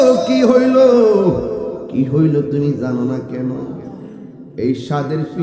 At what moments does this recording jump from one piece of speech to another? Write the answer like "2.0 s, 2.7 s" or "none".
none